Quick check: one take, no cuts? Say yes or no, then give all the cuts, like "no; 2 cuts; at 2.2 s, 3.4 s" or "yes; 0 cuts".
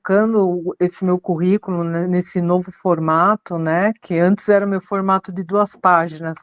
yes; 0 cuts